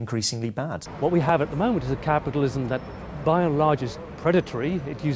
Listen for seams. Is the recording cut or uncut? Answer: cut